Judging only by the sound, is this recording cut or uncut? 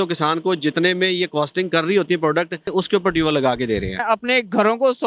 cut